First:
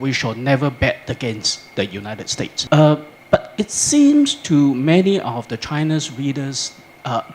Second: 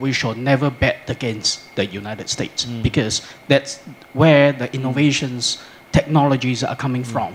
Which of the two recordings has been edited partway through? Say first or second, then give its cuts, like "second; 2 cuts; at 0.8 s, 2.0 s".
first; 1 cut; at 2.6 s